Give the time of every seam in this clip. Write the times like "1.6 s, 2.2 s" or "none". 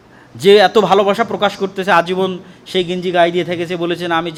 none